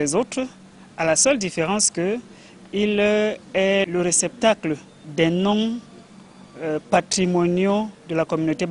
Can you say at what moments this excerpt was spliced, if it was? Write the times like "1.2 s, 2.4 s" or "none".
3.9 s, 5.0 s